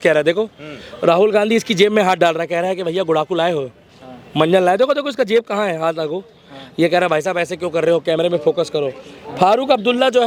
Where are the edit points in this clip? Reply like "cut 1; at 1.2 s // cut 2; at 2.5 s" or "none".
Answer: none